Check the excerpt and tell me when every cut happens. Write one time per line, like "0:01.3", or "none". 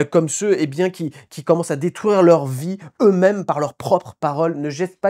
none